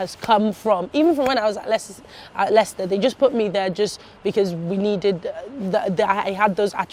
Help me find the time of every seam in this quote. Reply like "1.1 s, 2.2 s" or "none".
none

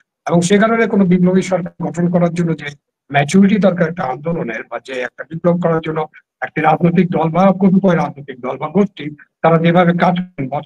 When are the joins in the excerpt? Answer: none

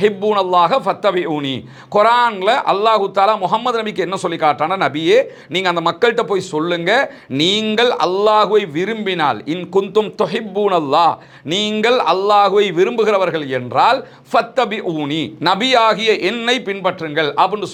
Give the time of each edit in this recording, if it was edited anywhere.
none

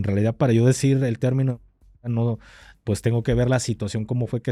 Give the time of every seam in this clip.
none

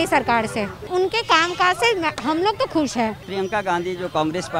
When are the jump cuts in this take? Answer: 0.8 s, 3.2 s

